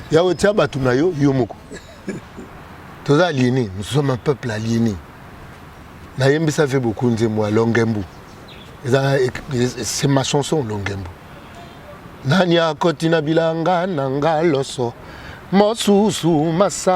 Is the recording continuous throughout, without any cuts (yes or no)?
no